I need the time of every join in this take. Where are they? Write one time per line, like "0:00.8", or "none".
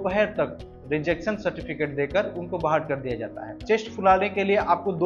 0:03.6